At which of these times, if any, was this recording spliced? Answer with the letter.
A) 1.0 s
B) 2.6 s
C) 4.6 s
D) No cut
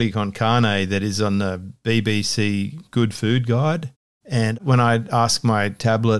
C